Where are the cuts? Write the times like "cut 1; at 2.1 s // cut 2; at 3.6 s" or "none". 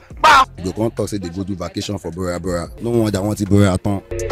cut 1; at 2.7 s